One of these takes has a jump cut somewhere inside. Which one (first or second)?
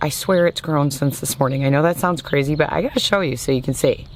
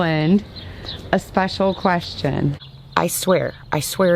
second